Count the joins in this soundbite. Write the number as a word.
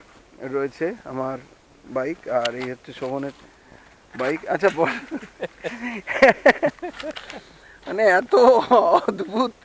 zero